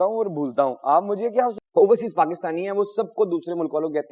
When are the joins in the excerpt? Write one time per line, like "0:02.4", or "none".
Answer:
0:01.6